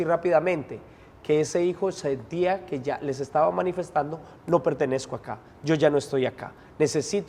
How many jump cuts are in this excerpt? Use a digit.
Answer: 0